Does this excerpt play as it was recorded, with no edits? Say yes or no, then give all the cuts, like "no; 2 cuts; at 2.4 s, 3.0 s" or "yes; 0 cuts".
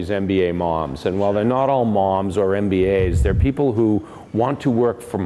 yes; 0 cuts